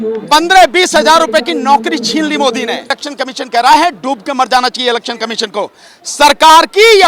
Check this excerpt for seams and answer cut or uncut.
cut